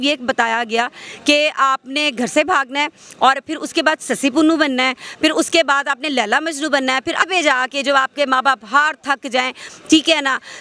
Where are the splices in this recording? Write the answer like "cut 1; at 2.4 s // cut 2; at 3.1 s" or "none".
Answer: cut 1; at 7.2 s